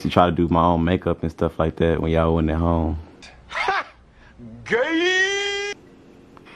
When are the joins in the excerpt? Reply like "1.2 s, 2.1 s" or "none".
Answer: none